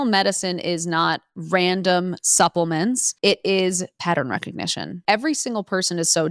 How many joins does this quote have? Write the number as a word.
two